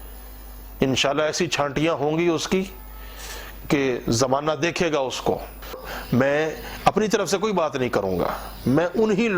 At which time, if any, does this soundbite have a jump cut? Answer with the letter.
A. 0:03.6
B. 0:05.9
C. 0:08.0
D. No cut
B